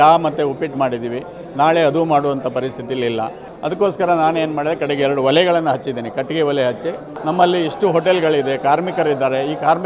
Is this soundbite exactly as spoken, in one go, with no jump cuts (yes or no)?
no